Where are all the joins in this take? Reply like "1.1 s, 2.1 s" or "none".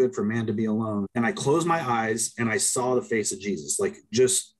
1.1 s